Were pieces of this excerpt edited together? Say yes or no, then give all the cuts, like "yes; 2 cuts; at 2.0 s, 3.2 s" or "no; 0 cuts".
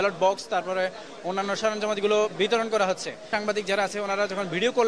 yes; 1 cut; at 3.2 s